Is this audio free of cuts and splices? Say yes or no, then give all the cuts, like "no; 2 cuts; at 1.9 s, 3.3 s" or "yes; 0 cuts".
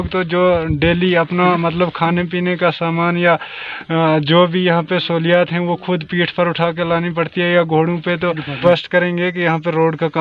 no; 1 cut; at 8.5 s